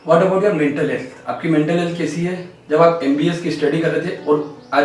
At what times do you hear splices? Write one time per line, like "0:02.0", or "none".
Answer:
none